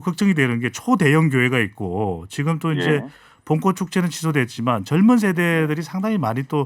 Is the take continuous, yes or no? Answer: yes